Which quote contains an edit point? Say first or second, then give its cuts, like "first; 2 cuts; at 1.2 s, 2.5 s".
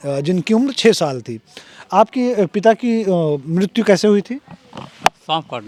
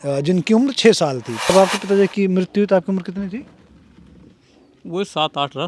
second; 1 cut; at 1.5 s